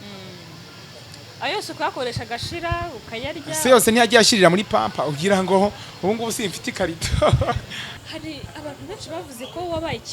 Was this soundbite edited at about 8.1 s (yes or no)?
yes